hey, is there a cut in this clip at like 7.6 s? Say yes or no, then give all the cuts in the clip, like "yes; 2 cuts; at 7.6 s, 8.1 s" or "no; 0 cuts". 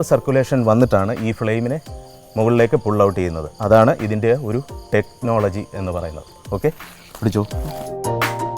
yes; 1 cut; at 7.6 s